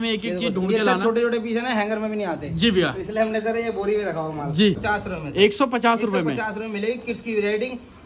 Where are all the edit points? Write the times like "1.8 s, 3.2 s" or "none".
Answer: 4.8 s